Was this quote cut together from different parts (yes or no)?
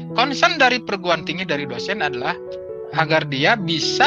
yes